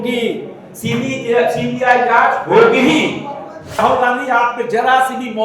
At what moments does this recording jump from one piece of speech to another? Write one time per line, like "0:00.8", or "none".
0:03.8